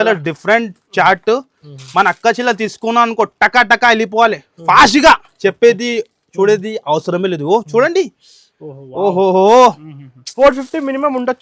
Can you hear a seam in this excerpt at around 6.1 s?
no; 1 cut; at 10.3 s

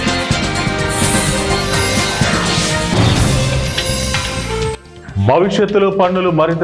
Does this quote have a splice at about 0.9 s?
yes; 2 cuts; at 0.9 s, 4.9 s

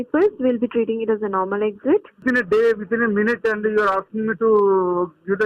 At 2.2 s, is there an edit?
yes; 1 cut; at 2.2 s

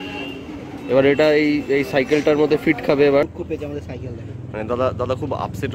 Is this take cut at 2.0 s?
no; 1 cut; at 3.4 s

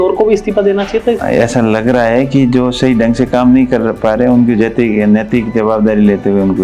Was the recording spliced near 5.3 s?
no; 1 cut; at 1.2 s

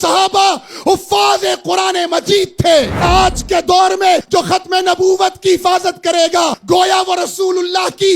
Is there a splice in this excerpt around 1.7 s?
no; 3 cuts; at 3.0 s, 4.2 s, 6.6 s

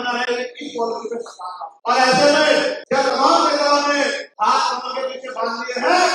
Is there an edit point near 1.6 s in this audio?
yes; 3 cuts; at 1.6 s, 2.8 s, 4.3 s

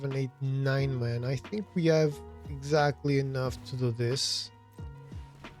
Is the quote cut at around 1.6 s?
no; 1 cut; at 4.2 s

